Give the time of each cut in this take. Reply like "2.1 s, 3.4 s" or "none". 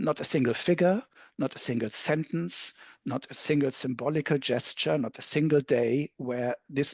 none